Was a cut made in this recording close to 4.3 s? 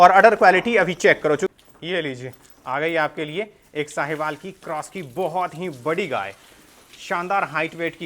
no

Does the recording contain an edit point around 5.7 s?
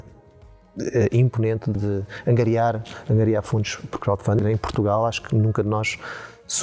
no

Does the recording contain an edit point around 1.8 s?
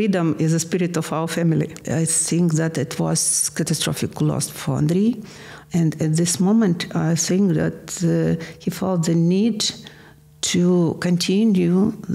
yes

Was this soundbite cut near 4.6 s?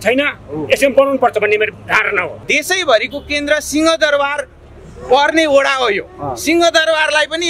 no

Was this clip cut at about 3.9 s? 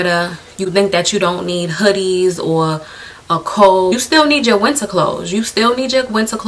yes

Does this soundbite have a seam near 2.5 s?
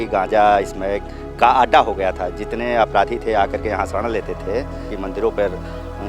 no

